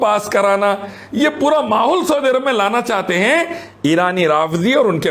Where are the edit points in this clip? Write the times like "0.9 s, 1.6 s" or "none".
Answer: none